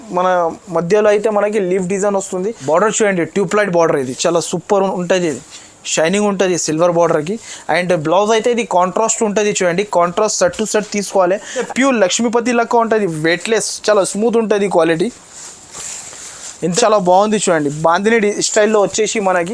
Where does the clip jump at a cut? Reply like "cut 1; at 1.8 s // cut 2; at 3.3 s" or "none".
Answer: cut 1; at 2.6 s // cut 2; at 11.7 s // cut 3; at 16.8 s

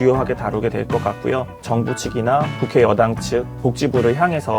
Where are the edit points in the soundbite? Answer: cut 1; at 1.5 s // cut 2; at 2.5 s

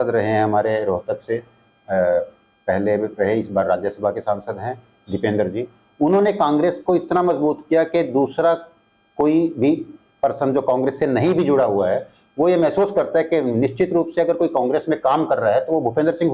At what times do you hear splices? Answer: none

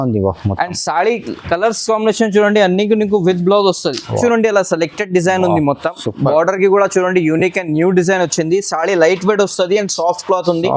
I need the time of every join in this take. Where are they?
cut 1; at 4.2 s

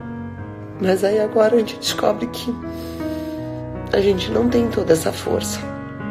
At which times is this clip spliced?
cut 1; at 0.8 s // cut 2; at 2.6 s // cut 3; at 3.9 s // cut 4; at 5.4 s

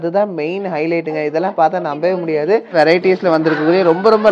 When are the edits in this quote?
cut 1; at 2.7 s

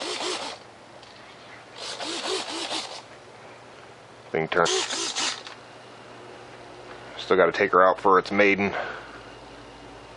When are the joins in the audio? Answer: none

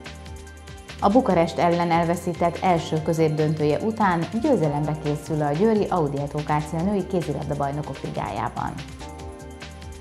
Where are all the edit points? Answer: cut 1; at 8.9 s

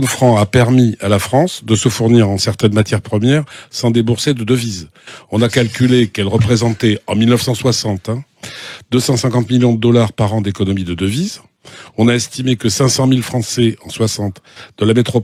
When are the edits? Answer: none

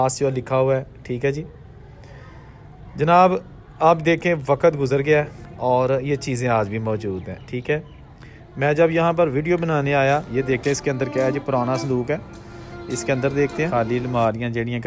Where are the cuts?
cut 1; at 10.3 s // cut 2; at 13.7 s

